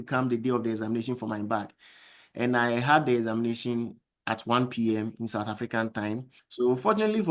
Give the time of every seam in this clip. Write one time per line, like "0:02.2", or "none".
0:06.3